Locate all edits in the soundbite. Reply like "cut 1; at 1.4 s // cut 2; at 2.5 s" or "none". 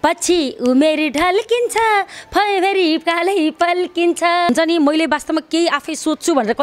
cut 1; at 4.5 s

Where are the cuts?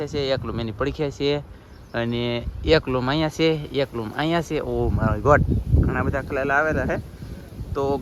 none

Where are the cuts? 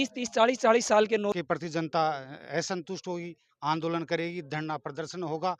cut 1; at 1.3 s

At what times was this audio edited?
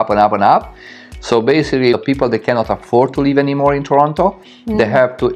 cut 1; at 2.0 s

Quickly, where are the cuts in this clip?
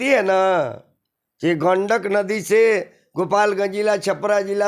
none

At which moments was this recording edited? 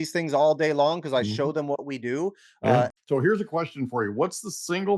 cut 1; at 3.0 s

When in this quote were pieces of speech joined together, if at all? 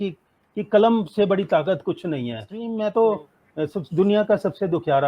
cut 1; at 2.6 s

